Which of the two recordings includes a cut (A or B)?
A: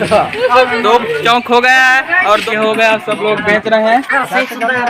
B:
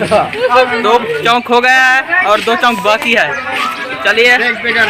A